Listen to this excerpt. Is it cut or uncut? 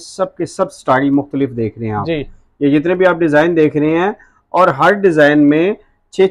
uncut